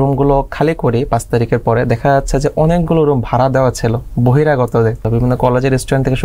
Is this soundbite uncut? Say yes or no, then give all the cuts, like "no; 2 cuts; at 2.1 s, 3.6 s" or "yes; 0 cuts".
no; 1 cut; at 5.0 s